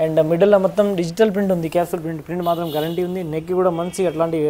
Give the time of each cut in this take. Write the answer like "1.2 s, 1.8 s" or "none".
none